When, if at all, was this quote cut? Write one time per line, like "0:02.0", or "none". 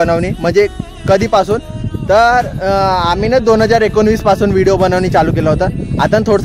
none